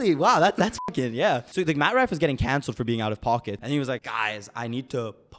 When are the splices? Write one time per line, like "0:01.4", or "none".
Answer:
0:01.5
0:03.8